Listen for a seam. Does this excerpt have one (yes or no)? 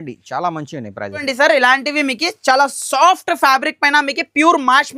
no